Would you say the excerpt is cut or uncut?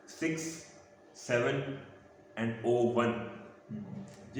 uncut